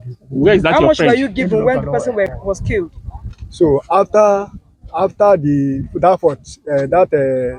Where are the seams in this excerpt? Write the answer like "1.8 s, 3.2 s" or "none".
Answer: none